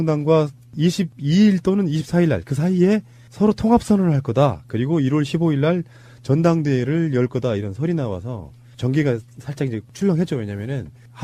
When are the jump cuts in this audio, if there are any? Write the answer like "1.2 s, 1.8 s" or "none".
none